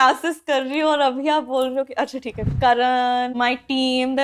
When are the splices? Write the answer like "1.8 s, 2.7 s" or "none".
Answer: 2.5 s, 3.3 s